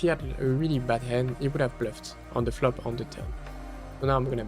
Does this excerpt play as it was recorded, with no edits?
no; 1 cut; at 1.3 s

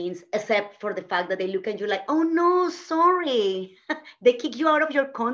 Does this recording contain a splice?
no; 0 cuts

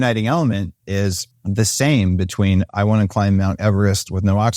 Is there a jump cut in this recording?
yes; 1 cut; at 1.3 s

